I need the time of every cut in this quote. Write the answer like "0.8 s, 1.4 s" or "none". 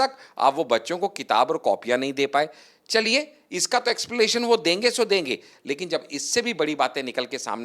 none